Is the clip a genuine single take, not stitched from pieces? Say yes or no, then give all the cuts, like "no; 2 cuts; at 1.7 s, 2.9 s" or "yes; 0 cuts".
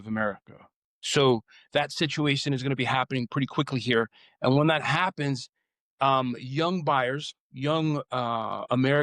no; 1 cut; at 4.2 s